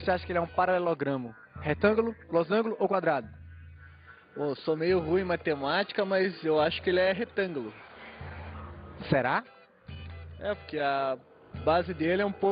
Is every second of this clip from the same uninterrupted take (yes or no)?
no